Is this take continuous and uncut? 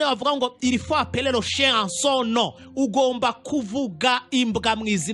yes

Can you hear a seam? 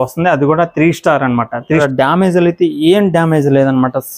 yes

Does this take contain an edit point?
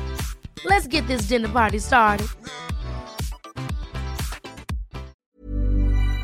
yes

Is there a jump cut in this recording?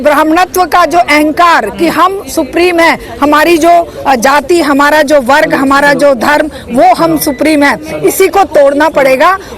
no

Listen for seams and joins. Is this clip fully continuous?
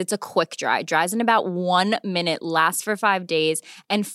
yes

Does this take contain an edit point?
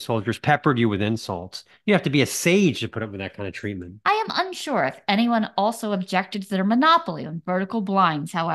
yes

